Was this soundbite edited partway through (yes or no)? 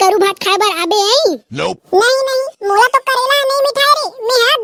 no